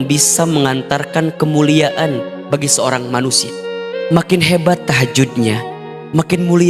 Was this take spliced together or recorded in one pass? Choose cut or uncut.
uncut